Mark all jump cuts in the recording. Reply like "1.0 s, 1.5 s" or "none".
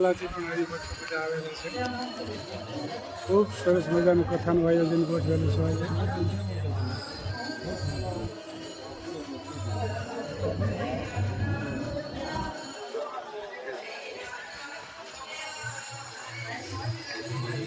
none